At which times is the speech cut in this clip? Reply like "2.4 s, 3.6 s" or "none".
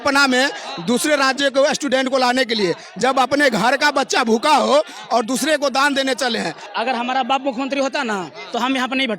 6.6 s